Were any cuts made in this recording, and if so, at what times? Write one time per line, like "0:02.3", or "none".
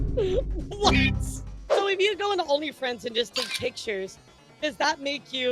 0:01.6